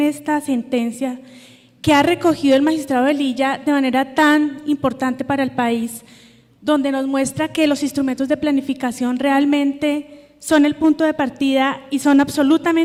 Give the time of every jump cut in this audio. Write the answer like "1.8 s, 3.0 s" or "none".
none